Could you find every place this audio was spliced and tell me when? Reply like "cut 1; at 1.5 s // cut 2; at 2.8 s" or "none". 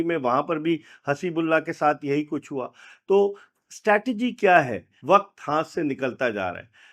cut 1; at 4.9 s